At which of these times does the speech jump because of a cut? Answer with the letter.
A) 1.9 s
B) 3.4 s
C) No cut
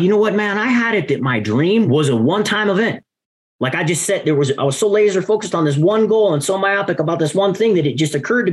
A